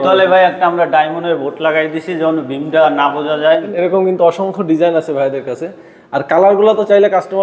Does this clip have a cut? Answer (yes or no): yes